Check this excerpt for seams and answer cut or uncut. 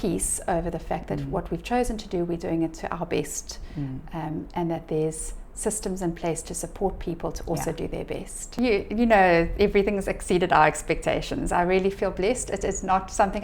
cut